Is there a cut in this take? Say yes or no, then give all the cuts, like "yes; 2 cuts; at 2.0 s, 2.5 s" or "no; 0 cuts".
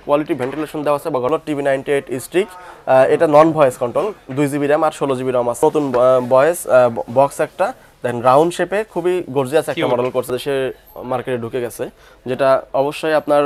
yes; 3 cuts; at 1.3 s, 5.6 s, 10.3 s